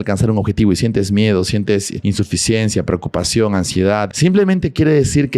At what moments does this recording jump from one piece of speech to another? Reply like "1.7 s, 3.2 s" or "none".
1.9 s, 4.1 s

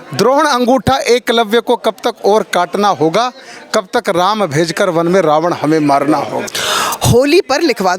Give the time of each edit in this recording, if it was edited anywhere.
6.4 s

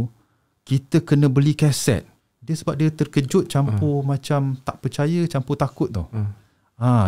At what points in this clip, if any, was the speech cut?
2.2 s

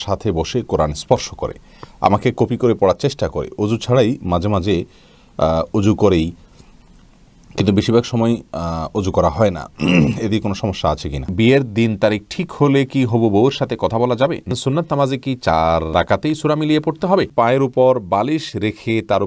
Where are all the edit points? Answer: 11.3 s, 14.5 s, 15.9 s, 17.3 s

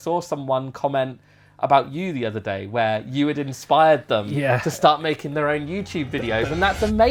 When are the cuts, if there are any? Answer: none

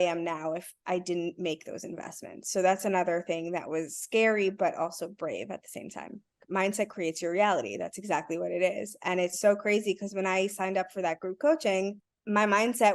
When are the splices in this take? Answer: 6.4 s

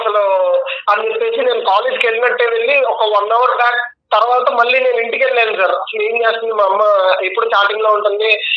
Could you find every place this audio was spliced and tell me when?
none

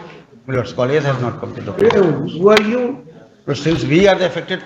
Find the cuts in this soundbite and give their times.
none

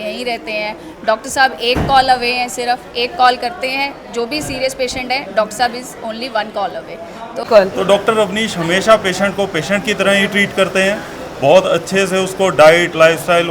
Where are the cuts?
7.4 s

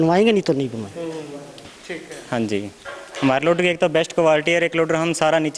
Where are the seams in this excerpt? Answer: 1.7 s

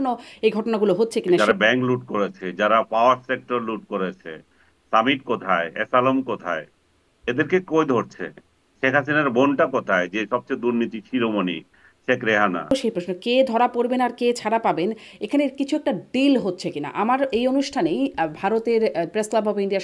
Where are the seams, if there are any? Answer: 1.4 s, 12.7 s

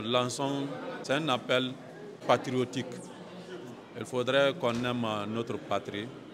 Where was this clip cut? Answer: 1.0 s, 2.1 s

